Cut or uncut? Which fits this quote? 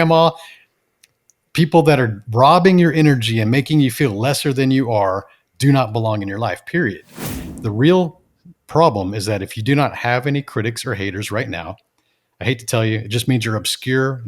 cut